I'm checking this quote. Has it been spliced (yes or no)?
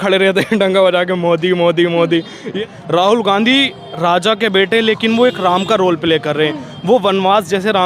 yes